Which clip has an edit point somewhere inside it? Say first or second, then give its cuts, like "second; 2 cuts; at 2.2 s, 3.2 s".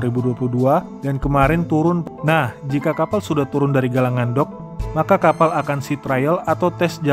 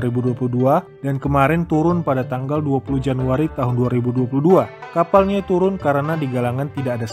first; 1 cut; at 2.0 s